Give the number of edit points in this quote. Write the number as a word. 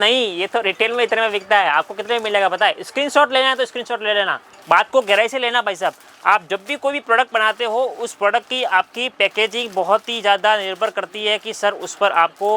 one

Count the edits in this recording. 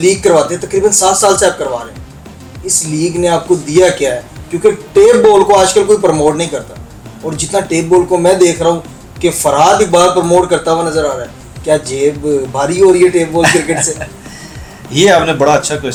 zero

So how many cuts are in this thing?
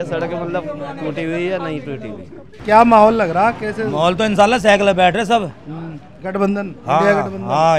one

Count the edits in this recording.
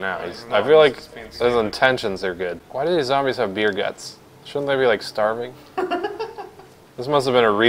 one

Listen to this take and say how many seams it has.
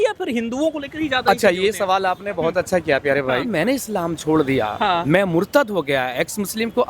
two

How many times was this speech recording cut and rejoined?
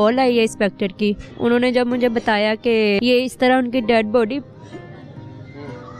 two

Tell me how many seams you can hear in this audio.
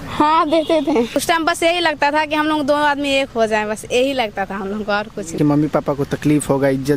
two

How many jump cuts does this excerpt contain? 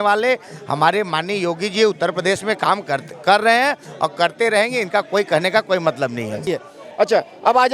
one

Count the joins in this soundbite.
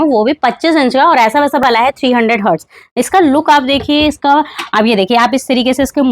one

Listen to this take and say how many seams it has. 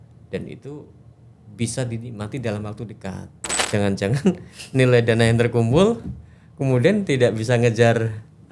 one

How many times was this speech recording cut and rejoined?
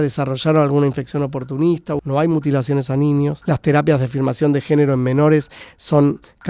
two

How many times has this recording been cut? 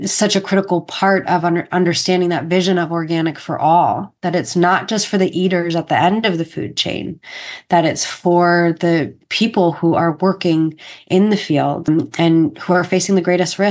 two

